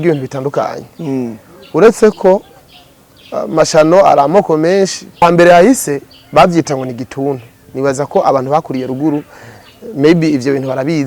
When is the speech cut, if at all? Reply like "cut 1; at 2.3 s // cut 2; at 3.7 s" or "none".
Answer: cut 1; at 5.2 s